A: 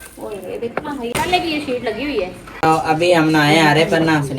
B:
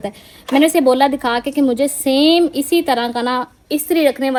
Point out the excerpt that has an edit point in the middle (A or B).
A